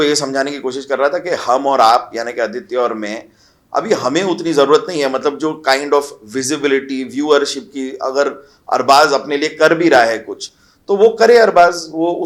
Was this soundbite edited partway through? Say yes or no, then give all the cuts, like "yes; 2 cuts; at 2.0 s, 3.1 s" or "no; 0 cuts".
no; 0 cuts